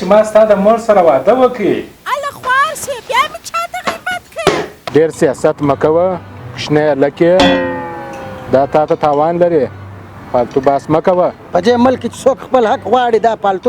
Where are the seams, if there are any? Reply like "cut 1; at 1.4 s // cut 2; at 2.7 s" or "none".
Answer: cut 1; at 4.8 s